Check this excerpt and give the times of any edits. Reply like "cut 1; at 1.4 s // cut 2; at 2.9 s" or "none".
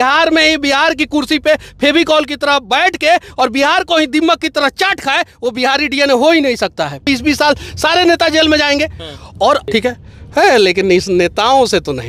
cut 1; at 7.0 s // cut 2; at 9.6 s